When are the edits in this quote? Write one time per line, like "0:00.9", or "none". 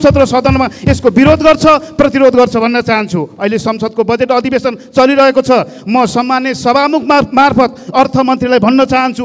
none

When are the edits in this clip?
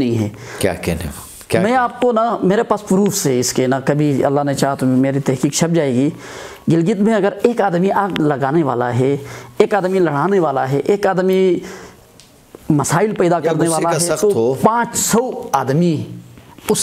none

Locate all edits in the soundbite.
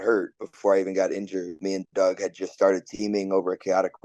0:01.6

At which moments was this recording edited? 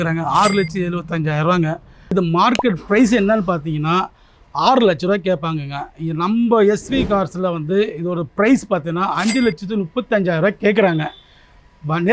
0:01.9

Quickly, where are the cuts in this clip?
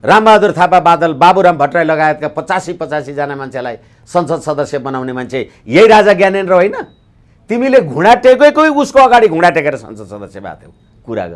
none

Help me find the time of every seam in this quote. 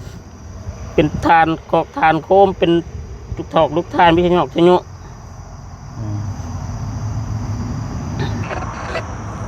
0:08.4

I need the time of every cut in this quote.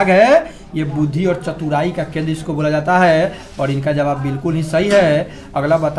none

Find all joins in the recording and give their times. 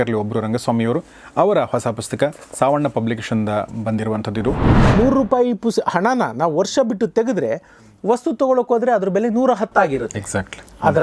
0:04.8

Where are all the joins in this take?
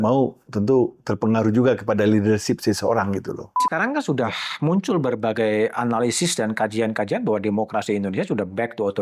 0:03.6

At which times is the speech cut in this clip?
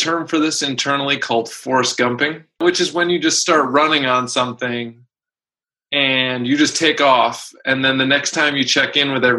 0:02.6

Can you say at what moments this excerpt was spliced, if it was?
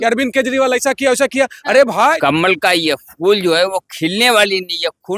0:02.2

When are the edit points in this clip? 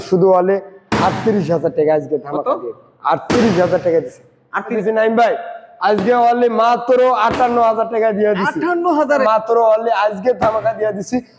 0:04.7
0:09.1

